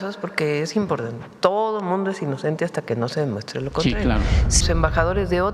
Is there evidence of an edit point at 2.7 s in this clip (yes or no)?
no